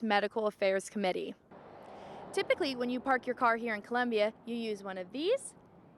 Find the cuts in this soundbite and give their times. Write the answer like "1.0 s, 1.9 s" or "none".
1.4 s